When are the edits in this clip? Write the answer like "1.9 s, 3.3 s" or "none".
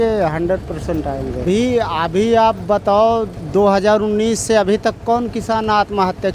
1.4 s